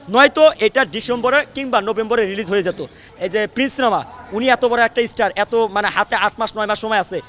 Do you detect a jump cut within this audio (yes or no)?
yes